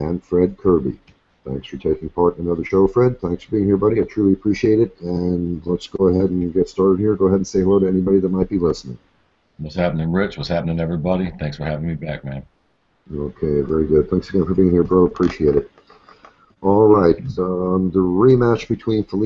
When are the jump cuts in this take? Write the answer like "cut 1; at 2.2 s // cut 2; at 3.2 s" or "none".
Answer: cut 1; at 7.5 s